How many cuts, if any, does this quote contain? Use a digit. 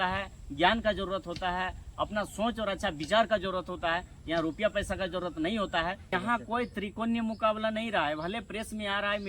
1